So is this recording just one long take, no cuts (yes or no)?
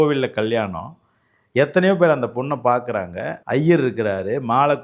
no